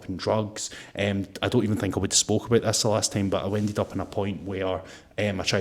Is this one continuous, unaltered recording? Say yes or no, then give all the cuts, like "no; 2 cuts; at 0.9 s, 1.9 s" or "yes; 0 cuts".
yes; 0 cuts